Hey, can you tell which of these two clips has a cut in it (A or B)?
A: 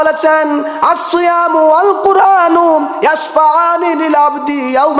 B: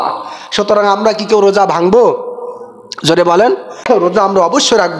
B